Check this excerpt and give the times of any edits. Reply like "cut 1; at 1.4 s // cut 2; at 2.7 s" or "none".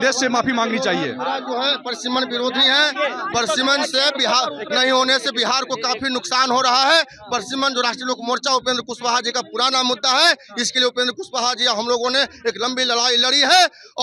none